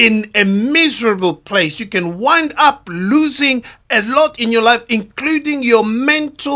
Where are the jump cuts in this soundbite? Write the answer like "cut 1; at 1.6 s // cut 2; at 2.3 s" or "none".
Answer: none

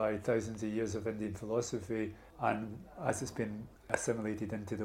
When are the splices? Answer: cut 1; at 2.2 s // cut 2; at 3.9 s

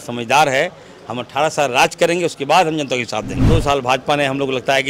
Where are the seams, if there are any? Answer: cut 1; at 3.4 s

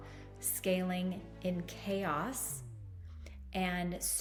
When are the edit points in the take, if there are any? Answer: none

